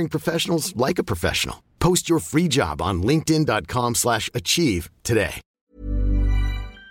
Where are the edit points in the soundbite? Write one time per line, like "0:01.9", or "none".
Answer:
0:05.6